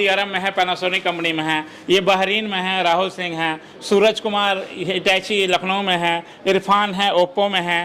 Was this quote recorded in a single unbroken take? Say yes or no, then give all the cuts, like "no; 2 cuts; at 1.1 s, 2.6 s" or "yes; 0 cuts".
yes; 0 cuts